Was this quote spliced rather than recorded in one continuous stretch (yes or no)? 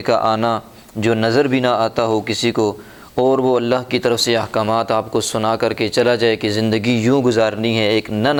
no